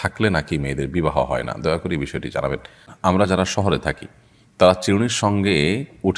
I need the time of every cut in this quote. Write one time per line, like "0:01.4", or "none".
0:02.9

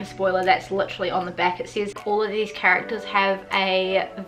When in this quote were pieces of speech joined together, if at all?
0:02.0

